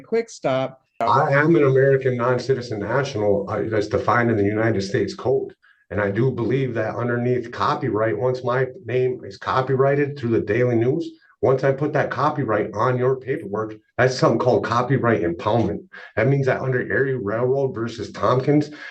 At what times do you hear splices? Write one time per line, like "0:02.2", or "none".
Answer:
0:01.0